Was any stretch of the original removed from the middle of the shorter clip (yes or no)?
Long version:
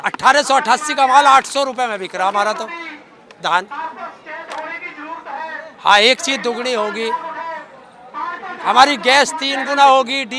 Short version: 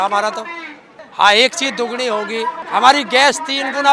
yes